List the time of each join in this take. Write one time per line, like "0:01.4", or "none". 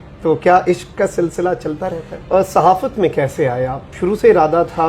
0:02.3